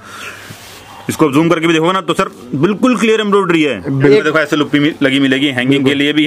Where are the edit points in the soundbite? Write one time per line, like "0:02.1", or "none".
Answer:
0:04.1

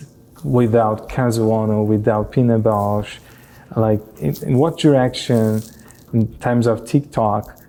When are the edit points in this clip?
none

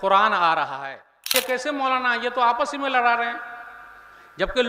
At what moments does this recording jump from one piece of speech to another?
0:01.3

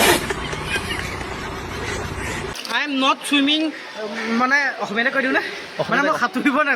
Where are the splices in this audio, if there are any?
0:02.5

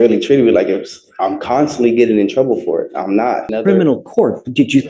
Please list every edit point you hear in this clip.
0:03.5

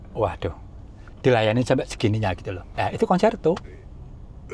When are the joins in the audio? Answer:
none

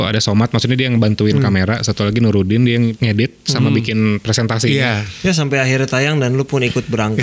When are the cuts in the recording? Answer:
0:02.9
0:05.1

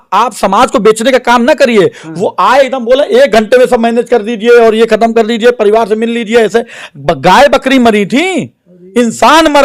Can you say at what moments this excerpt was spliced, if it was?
none

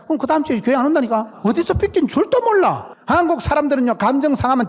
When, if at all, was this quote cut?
0:01.3
0:02.9

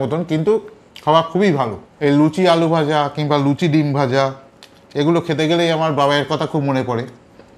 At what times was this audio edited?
0:01.8

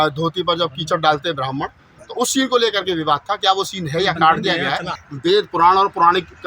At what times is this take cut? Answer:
0:05.0

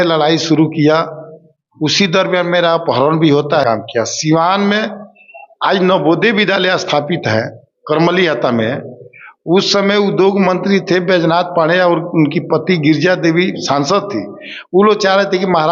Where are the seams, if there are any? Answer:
0:03.6

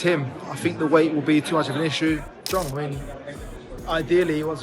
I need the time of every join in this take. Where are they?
0:02.4

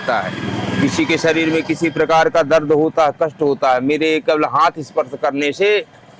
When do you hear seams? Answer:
none

